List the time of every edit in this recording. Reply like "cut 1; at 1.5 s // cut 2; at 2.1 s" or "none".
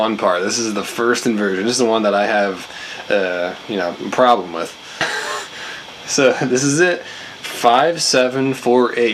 none